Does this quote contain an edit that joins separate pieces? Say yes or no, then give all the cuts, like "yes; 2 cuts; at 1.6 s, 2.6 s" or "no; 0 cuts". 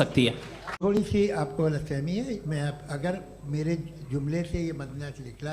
yes; 1 cut; at 1.0 s